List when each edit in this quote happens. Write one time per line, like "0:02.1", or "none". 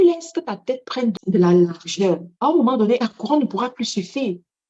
0:01.2
0:02.3
0:03.0